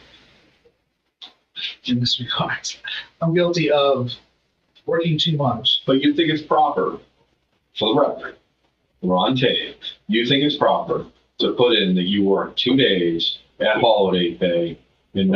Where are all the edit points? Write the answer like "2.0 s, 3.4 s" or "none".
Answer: 5.8 s

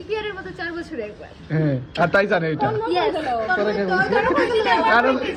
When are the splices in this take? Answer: none

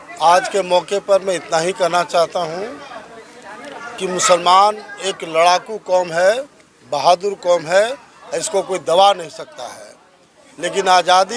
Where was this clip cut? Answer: none

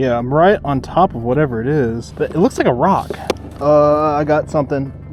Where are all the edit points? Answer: 2.0 s, 3.4 s

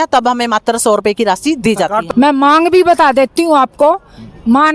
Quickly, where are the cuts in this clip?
2.0 s

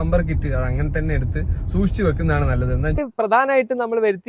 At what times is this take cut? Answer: 3.0 s

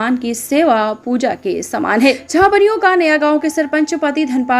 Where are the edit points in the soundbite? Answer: 2.2 s

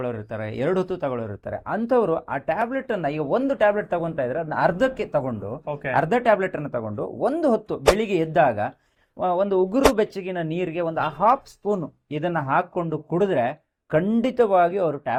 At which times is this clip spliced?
none

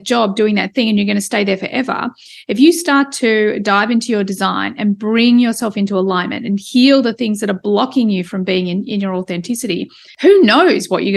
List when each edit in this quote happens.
10.0 s

